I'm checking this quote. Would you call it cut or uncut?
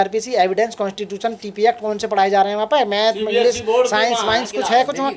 uncut